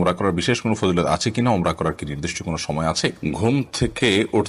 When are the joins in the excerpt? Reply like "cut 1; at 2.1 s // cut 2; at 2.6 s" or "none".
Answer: cut 1; at 3.2 s